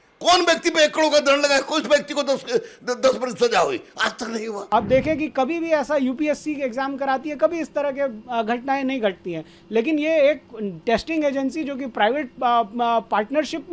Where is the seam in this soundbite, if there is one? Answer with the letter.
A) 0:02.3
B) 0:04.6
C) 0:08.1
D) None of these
B